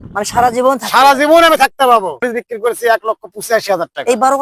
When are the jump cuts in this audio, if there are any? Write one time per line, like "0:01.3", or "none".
0:02.2